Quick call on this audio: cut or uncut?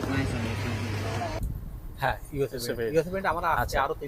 cut